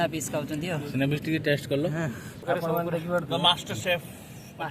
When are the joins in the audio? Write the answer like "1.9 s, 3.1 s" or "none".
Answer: 2.4 s